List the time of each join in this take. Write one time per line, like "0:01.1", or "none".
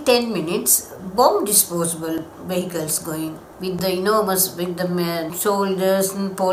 0:03.5
0:05.3